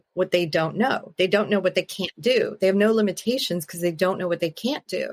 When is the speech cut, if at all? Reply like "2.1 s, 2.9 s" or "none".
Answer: none